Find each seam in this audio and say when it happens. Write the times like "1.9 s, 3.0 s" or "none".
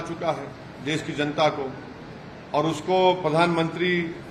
none